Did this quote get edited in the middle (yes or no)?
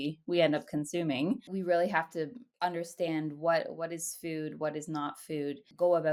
no